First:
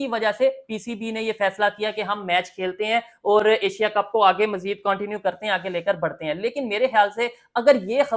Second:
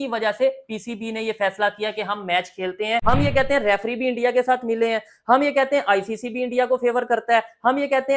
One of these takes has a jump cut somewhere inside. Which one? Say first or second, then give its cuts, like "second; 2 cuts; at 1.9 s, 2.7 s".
second; 1 cut; at 3.0 s